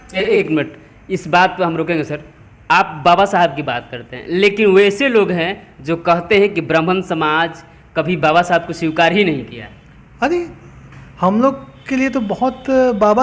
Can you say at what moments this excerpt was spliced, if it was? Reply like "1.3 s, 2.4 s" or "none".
none